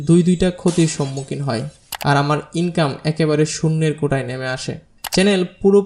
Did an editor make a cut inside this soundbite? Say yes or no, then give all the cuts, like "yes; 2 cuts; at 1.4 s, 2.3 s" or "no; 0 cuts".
no; 0 cuts